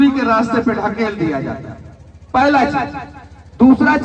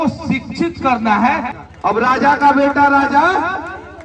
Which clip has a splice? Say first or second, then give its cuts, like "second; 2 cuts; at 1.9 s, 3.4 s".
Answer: second; 1 cut; at 1.5 s